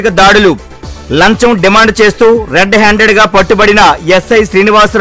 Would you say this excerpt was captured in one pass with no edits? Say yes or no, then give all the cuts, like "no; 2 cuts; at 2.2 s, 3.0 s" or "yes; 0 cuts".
yes; 0 cuts